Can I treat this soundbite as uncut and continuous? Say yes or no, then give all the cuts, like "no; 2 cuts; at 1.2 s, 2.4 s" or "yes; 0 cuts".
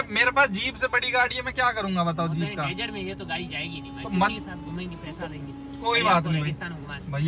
yes; 0 cuts